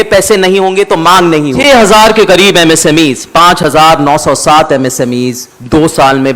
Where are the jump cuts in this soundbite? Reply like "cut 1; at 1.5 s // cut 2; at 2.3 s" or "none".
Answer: cut 1; at 1.6 s